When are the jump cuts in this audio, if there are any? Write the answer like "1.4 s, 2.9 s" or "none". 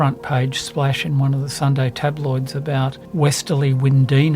1.5 s, 3.0 s